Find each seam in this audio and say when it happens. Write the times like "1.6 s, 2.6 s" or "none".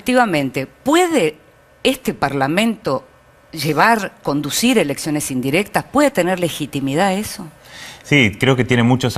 3.1 s